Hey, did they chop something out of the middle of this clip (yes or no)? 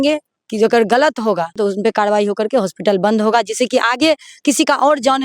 yes